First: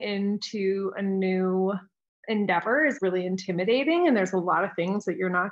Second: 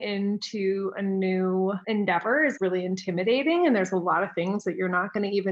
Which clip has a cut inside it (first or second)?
second